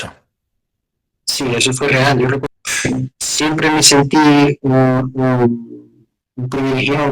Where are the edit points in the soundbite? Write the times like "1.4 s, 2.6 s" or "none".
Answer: 2.4 s